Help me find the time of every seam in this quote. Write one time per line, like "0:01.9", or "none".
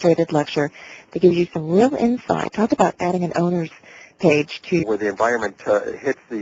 none